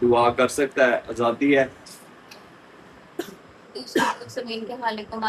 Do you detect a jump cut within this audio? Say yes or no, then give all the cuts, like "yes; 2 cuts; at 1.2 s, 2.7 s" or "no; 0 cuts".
no; 0 cuts